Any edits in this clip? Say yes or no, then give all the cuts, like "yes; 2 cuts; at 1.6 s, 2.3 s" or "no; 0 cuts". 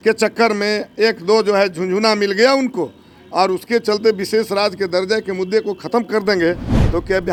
no; 0 cuts